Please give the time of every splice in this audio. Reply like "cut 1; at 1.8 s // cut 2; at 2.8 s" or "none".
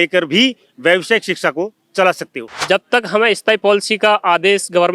cut 1; at 2.6 s